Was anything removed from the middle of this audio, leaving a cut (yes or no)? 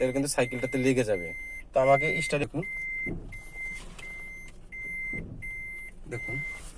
yes